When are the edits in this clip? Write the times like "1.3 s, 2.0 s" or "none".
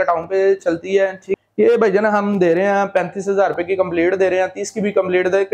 1.2 s